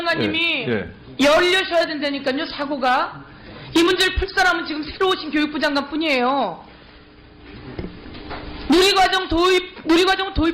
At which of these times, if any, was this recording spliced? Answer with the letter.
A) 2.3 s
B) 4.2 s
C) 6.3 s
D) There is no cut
A